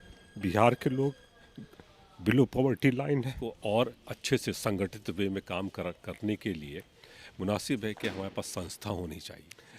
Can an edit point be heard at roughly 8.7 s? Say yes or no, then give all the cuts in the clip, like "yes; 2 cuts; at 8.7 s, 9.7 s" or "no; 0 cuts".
no; 1 cut; at 3.5 s